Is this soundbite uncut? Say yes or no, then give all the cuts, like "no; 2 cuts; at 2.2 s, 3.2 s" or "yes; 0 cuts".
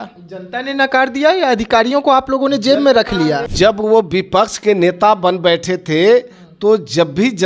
no; 1 cut; at 3.5 s